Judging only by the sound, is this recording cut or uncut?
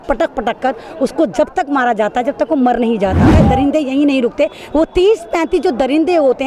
cut